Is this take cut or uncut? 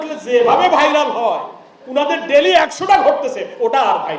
uncut